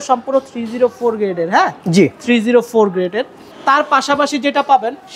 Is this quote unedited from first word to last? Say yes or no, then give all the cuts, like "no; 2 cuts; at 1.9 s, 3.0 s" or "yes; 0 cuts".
yes; 0 cuts